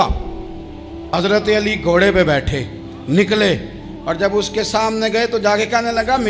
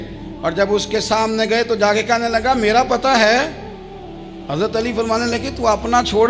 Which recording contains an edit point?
first; 1 cut; at 1.1 s

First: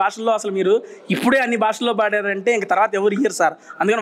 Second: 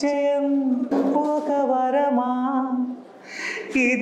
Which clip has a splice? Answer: second; 1 cut; at 0.9 s

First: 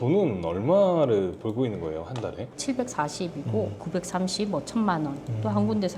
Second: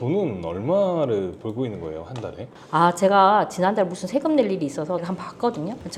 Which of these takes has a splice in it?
first; 2 cuts; at 2.5 s, 3.8 s

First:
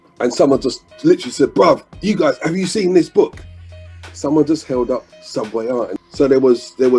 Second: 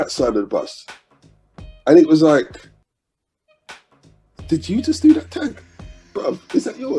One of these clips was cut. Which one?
first; 1 cut; at 5.9 s

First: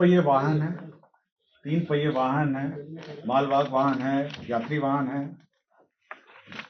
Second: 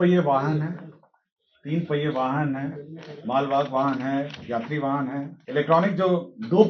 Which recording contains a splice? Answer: second; 1 cut; at 5.3 s

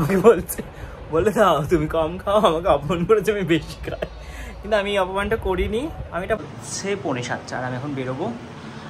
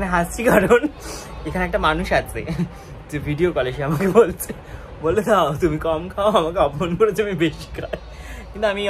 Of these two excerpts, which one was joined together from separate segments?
first; 1 cut; at 6.4 s

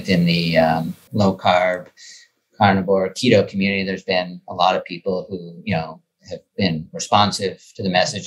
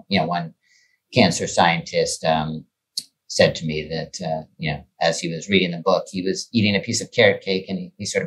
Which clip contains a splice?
first; 1 cut; at 1.0 s

